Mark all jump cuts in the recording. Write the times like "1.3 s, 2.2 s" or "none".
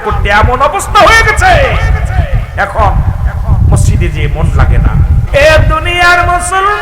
5.2 s